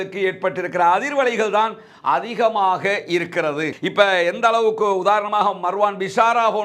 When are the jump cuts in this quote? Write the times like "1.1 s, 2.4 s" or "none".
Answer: 3.8 s

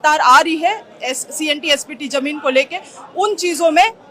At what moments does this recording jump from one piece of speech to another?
none

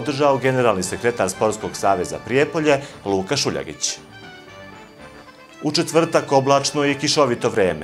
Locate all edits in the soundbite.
none

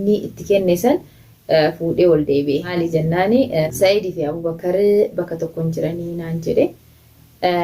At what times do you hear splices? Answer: 2.7 s, 3.7 s

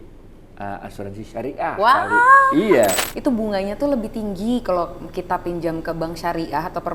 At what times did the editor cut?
3.1 s

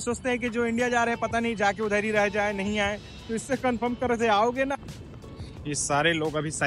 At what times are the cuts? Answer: 4.8 s

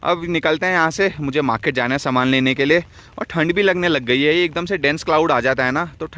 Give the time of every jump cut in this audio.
none

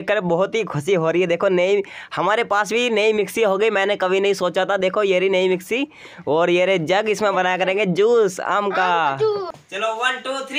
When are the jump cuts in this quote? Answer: 9.6 s

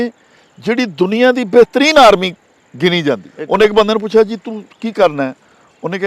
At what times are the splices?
3.3 s

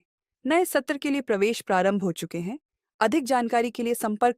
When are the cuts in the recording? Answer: none

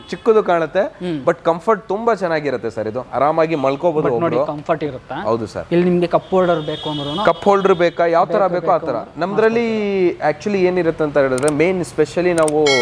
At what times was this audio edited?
none

